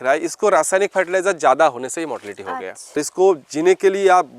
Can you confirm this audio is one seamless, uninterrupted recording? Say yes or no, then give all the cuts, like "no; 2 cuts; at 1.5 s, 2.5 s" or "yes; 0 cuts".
no; 1 cut; at 3.0 s